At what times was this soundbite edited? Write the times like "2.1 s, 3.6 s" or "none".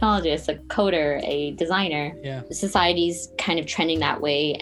none